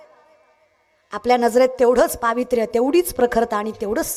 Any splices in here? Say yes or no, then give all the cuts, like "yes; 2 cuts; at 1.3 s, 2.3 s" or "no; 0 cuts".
no; 0 cuts